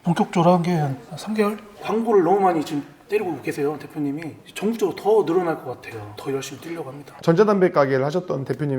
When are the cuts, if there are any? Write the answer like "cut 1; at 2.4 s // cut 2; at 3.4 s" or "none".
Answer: cut 1; at 1.8 s // cut 2; at 7.1 s